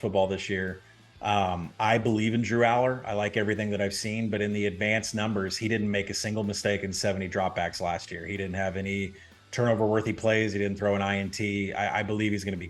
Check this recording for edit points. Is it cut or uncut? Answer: uncut